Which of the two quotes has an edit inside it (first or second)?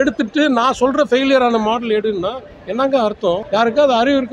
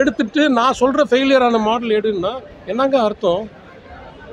first